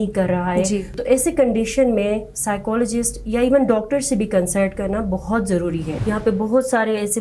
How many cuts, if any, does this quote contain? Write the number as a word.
two